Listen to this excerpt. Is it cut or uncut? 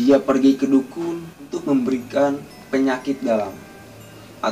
cut